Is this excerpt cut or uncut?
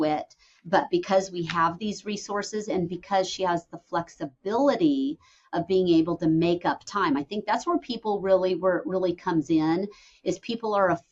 uncut